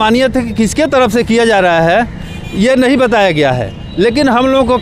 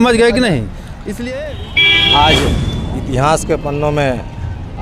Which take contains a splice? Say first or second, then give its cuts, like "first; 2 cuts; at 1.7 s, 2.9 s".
second; 1 cut; at 1.3 s